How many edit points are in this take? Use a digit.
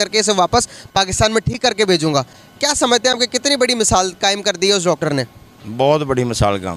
0